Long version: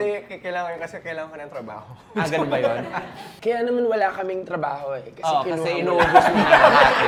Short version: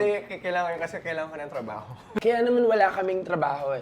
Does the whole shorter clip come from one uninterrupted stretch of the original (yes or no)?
no